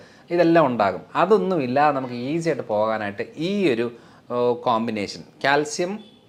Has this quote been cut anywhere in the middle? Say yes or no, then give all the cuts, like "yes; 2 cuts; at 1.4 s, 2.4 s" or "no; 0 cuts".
no; 0 cuts